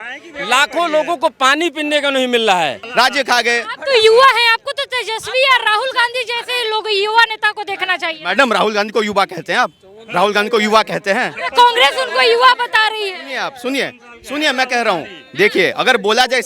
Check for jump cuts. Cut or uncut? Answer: cut